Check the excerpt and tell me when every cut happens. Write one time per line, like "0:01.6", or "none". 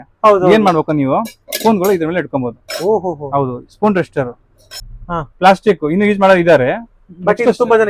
0:04.7